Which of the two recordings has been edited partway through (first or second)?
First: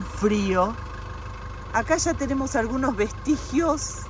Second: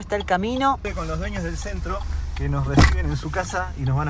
second